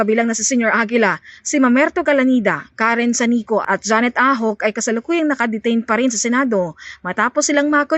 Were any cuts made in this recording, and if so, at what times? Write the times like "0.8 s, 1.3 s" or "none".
none